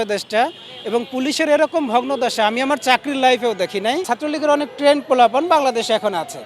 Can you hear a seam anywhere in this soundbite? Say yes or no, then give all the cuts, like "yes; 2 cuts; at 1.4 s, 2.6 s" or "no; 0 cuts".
yes; 1 cut; at 4.1 s